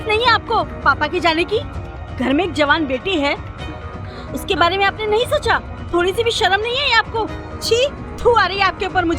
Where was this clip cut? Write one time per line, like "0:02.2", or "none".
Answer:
0:05.8
0:07.5